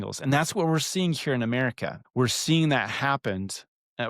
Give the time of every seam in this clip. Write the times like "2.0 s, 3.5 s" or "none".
2.0 s